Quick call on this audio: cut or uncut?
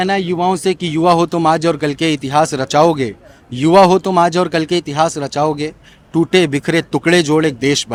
uncut